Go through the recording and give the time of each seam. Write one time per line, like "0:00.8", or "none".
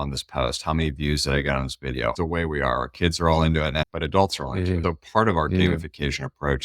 0:02.2